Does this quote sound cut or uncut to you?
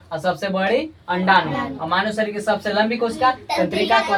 uncut